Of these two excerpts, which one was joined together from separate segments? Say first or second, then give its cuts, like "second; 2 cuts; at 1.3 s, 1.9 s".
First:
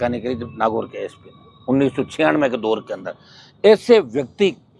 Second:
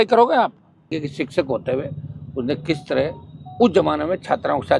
second; 1 cut; at 1.0 s